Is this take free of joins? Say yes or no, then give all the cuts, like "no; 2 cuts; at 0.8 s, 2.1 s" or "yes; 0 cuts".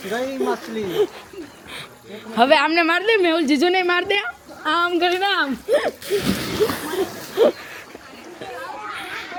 yes; 0 cuts